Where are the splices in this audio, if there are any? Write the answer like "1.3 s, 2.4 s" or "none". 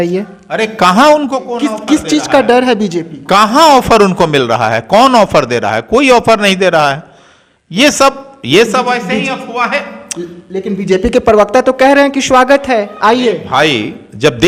none